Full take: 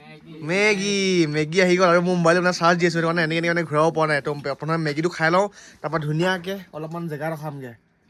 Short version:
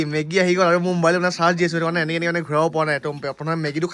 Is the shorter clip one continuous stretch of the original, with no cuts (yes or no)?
yes